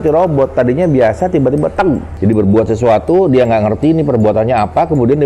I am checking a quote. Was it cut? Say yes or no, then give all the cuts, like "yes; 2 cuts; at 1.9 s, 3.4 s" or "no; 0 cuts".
yes; 1 cut; at 2.1 s